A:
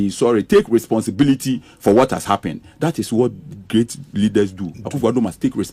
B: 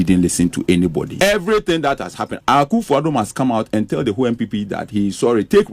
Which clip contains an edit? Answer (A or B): B